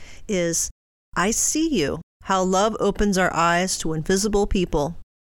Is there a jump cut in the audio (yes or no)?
yes